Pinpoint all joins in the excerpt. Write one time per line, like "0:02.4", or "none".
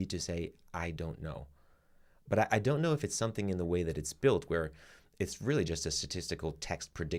none